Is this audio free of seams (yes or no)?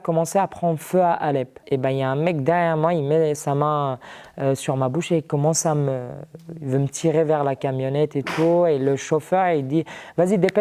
no